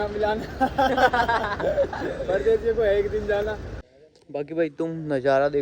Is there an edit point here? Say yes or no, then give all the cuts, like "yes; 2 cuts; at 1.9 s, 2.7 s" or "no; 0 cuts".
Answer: yes; 1 cut; at 3.6 s